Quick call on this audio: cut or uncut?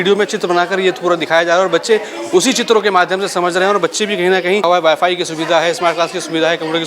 cut